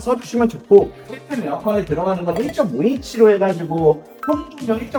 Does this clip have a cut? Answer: no; 0 cuts

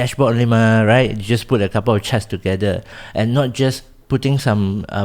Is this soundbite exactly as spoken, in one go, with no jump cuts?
no; 1 cut; at 3.0 s

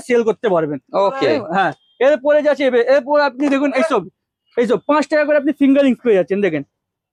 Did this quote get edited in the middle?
no; 0 cuts

